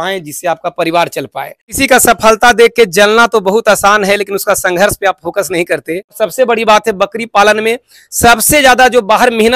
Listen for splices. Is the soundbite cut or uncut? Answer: cut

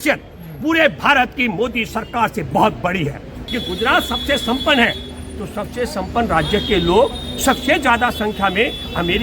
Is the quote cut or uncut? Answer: cut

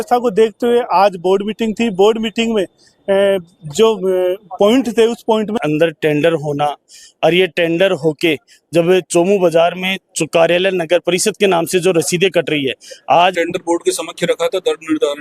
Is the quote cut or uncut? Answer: cut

